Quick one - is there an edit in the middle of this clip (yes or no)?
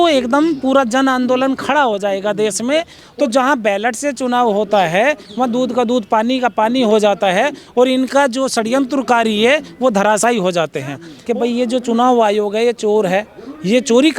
yes